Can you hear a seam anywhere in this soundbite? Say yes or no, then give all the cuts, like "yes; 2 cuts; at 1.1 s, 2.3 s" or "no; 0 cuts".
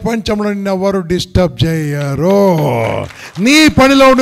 no; 0 cuts